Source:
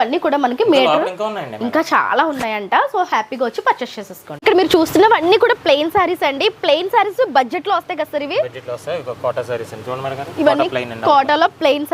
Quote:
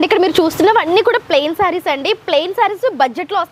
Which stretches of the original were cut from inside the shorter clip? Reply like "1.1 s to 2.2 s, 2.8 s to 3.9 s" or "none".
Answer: none